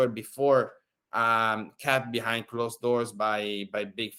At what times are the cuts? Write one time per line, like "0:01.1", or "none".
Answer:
none